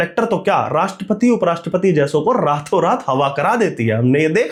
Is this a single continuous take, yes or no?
yes